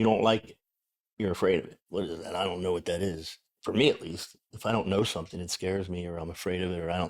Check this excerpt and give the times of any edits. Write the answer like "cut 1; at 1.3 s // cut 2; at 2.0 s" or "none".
cut 1; at 1.8 s